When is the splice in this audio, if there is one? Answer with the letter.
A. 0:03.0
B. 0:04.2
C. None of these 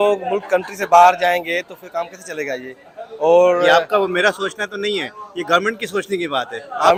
C